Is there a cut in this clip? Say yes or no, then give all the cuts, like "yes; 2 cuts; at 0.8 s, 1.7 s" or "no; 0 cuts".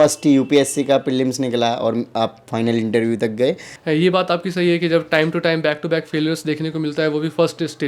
yes; 1 cut; at 3.7 s